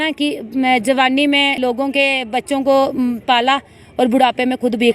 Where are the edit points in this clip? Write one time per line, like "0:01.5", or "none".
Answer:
0:01.6